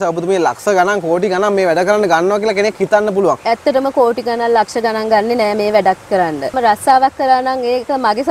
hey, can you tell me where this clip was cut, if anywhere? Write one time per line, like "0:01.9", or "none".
0:03.4
0:06.6